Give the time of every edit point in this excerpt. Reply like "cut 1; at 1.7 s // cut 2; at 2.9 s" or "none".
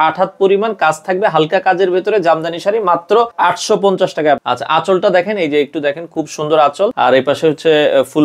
cut 1; at 3.3 s // cut 2; at 4.4 s // cut 3; at 6.9 s

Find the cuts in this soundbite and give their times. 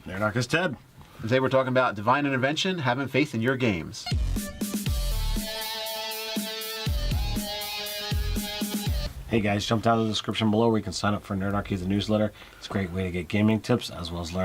none

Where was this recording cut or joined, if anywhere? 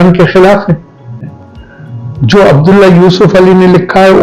cut 1; at 1.4 s

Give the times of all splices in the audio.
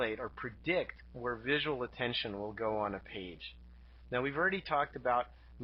none

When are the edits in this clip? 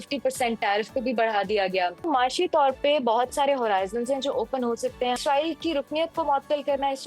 cut 1; at 2.1 s // cut 2; at 5.2 s

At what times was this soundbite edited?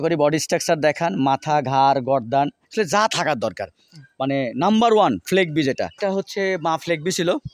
cut 1; at 6.0 s

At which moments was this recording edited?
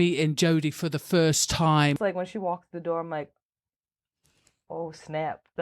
cut 1; at 2.0 s

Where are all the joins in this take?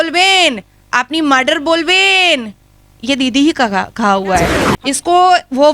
cut 1; at 4.6 s

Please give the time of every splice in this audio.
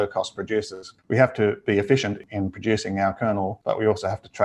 cut 1; at 0.9 s // cut 2; at 2.2 s // cut 3; at 3.6 s

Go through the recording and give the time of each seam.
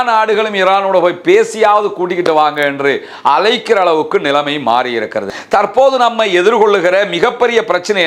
cut 1; at 5.3 s

